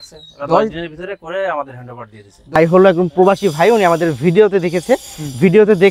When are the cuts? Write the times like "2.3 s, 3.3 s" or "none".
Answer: 2.5 s